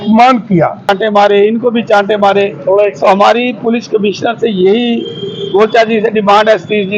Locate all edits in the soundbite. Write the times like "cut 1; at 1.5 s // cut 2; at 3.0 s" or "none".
cut 1; at 0.9 s